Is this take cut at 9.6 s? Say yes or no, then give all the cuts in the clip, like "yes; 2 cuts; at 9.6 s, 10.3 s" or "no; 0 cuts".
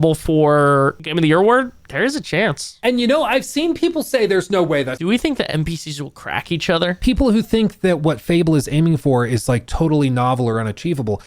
no; 4 cuts; at 1.0 s, 2.7 s, 4.9 s, 7.0 s